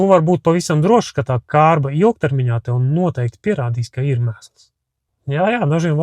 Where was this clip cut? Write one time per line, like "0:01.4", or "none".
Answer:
0:05.1